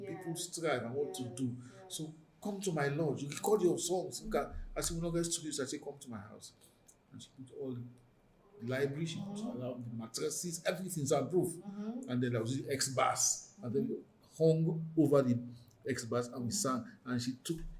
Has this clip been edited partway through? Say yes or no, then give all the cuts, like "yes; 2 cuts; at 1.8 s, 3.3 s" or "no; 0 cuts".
no; 0 cuts